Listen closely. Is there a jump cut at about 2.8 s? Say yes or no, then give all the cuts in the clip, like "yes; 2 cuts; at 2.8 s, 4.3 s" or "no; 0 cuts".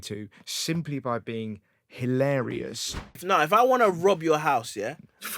yes; 1 cut; at 2.8 s